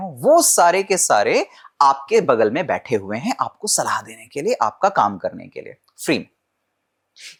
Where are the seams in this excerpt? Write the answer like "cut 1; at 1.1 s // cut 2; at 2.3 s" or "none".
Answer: none